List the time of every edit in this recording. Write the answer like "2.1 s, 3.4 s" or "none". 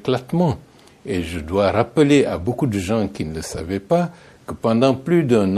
none

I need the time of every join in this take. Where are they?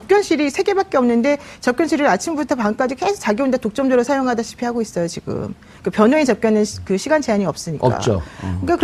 none

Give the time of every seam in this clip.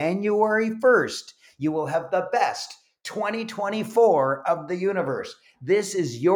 none

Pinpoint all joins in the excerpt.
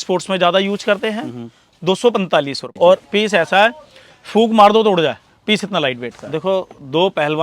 2.6 s, 6.1 s

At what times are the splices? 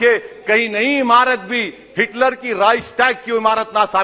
none

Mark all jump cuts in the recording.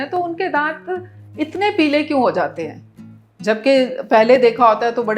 none

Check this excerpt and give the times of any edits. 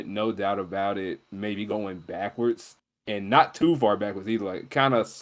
none

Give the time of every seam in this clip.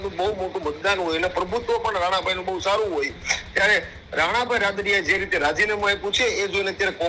none

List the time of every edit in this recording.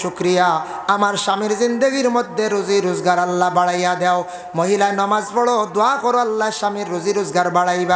none

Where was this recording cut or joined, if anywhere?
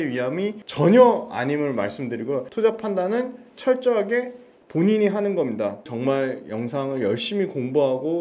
none

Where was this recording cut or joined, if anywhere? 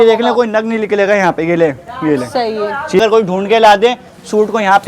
3.0 s

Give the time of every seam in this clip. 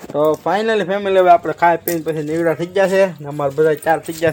none

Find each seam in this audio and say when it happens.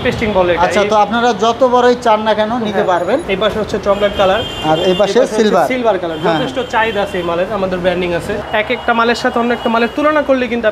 3.2 s, 8.3 s

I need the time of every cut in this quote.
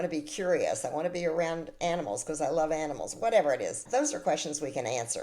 3.8 s

